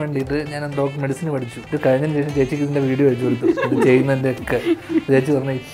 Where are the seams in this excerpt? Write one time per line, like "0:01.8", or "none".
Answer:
0:01.6